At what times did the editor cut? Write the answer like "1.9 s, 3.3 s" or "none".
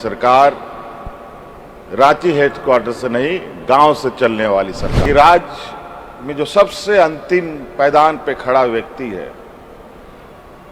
4.9 s